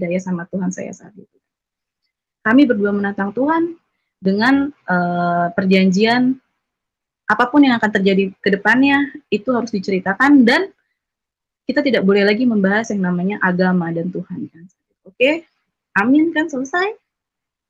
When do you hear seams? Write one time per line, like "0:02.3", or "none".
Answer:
none